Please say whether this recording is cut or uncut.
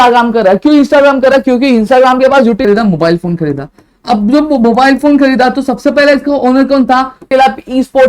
cut